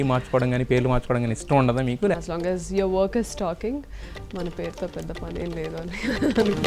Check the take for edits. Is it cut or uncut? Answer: cut